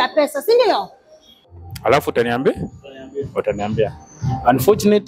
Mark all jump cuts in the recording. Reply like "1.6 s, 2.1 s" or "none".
1.6 s